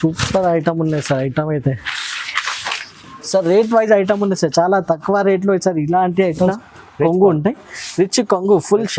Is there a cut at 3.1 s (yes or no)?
no